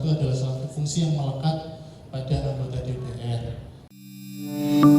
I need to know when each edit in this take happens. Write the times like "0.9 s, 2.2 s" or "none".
4.0 s